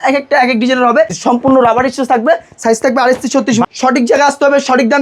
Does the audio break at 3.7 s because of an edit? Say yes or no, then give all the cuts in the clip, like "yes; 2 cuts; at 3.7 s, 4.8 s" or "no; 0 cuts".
yes; 2 cuts; at 1.2 s, 3.7 s